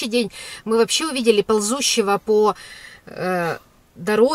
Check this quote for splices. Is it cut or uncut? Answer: uncut